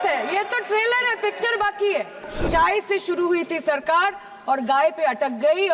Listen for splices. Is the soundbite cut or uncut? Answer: cut